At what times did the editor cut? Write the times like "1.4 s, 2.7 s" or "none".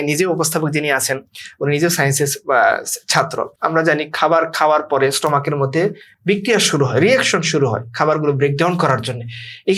3.5 s